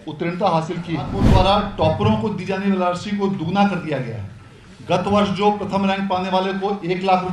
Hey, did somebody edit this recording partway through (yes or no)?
yes